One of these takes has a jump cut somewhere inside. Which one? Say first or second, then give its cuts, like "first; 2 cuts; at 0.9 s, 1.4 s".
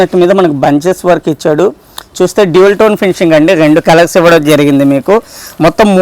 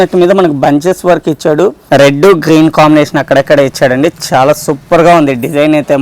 second; 1 cut; at 1.8 s